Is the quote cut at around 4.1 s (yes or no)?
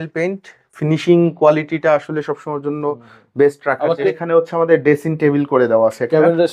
yes